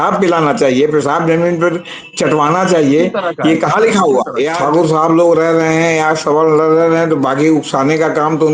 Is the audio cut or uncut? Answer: cut